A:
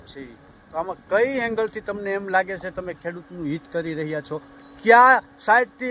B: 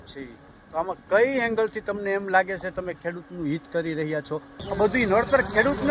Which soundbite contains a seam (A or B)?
B